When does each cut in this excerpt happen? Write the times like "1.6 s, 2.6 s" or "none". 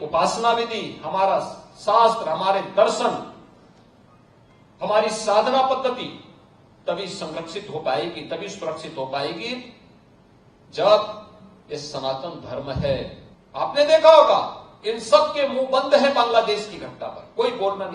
13.2 s